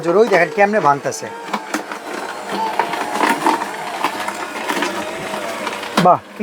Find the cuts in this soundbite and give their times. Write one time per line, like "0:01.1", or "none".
none